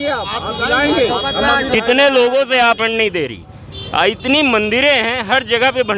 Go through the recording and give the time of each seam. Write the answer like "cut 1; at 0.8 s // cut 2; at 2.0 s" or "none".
cut 1; at 2.8 s